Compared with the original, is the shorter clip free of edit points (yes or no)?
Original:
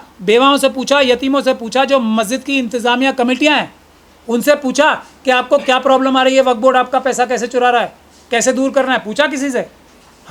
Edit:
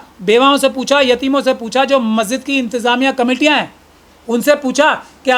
yes